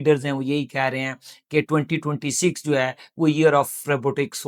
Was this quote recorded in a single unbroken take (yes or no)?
yes